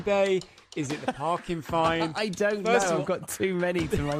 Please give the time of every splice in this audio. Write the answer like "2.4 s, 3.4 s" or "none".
none